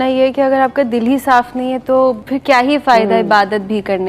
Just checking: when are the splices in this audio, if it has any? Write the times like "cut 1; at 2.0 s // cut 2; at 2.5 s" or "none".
cut 1; at 2.3 s